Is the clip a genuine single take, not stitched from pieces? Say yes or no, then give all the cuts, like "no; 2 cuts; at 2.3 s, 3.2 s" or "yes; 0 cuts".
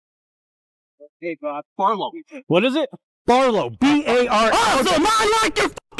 yes; 0 cuts